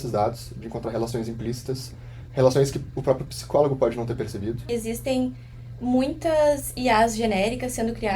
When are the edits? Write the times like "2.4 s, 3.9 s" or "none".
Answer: 4.6 s